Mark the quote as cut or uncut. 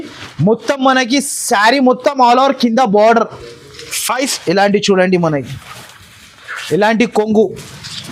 cut